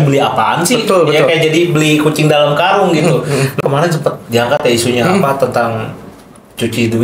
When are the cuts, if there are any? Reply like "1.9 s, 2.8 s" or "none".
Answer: 3.6 s